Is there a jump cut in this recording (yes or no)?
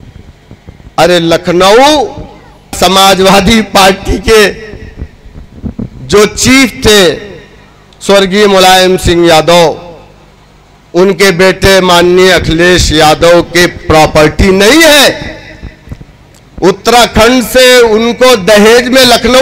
yes